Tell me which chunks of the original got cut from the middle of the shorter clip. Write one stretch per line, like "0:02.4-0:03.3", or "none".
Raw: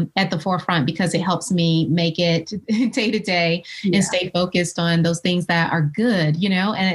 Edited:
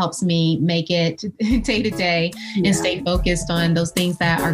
none